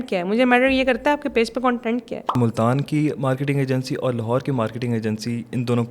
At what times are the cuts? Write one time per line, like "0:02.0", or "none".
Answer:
0:02.3